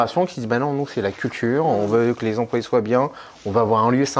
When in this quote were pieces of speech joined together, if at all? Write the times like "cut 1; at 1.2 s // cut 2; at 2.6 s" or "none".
none